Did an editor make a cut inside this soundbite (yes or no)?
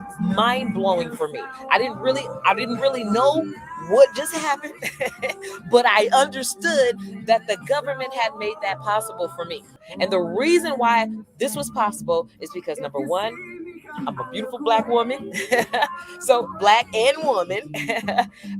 yes